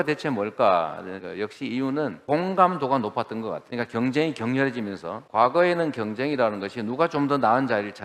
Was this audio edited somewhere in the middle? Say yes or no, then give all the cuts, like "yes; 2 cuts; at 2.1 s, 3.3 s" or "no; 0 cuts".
yes; 1 cut; at 1.1 s